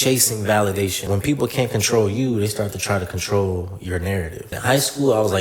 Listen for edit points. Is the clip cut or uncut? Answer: cut